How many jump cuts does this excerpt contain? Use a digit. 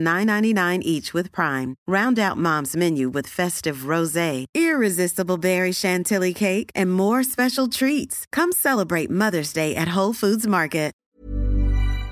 1